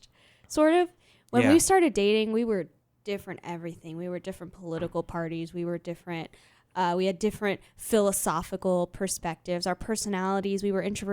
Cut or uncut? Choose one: uncut